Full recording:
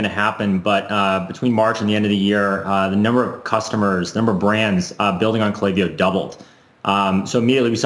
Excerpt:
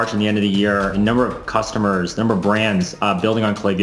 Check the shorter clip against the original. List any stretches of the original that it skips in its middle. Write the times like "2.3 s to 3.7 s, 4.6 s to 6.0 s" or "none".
2.6 s to 2.9 s

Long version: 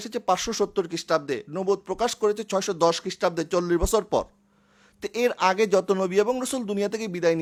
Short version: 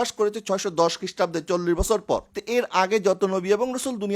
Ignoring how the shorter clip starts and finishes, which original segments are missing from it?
4.4 s to 5.0 s

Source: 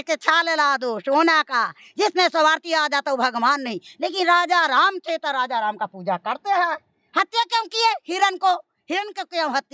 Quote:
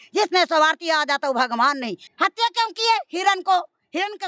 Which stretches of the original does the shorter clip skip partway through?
3.8 s to 6.9 s

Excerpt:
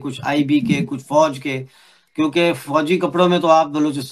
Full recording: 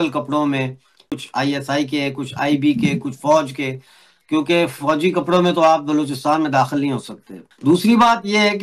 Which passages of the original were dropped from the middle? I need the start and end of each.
none

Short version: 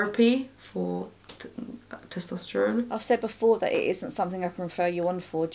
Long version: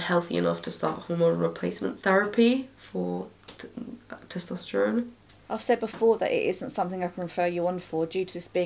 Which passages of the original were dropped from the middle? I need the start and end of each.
5.1 s to 5.5 s

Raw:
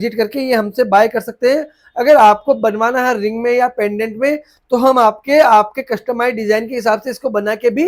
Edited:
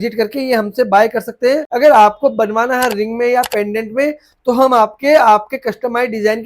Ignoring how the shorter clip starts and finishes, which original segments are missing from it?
1.7 s to 1.9 s

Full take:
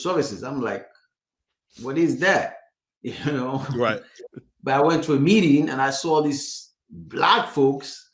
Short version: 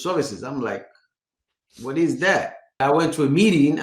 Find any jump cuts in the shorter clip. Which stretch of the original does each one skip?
2.6 s to 4.5 s

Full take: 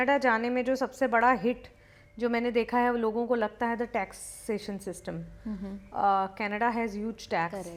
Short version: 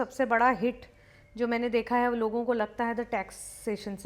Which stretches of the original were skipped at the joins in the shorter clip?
none

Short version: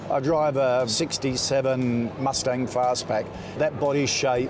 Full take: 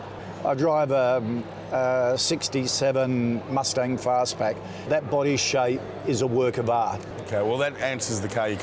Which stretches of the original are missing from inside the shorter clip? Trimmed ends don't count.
1.3 s to 2.2 s

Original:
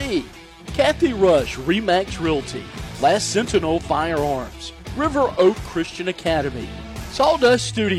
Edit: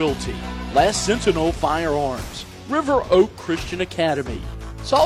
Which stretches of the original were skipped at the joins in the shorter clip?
none

